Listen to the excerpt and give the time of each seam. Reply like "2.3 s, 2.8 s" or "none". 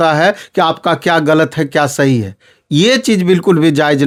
none